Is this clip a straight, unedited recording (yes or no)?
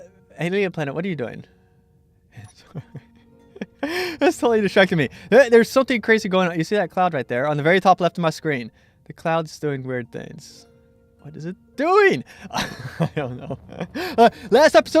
no